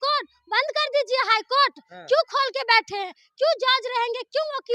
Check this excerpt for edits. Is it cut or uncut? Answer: uncut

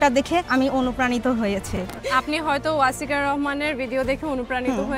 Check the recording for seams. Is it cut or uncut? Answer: uncut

